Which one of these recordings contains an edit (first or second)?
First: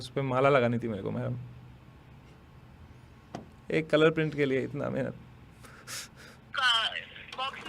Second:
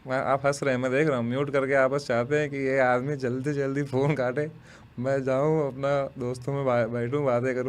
first